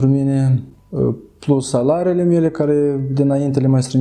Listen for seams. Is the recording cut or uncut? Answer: uncut